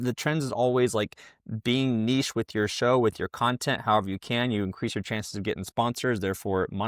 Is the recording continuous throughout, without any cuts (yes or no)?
yes